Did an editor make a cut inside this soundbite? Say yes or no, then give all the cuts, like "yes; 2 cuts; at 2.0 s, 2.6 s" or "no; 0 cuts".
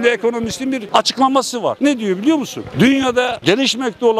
yes; 2 cuts; at 0.8 s, 1.8 s